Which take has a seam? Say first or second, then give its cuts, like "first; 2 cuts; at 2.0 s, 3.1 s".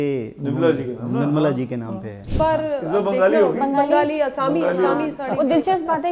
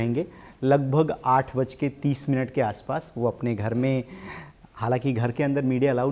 first; 1 cut; at 2.2 s